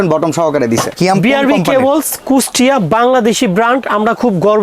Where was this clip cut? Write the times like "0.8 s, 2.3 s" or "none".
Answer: 0.9 s

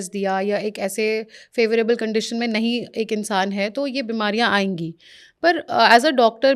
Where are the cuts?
none

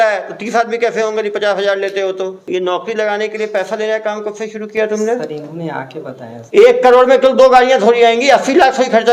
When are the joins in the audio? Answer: 2.4 s, 6.4 s

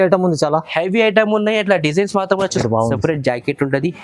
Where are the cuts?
2.6 s

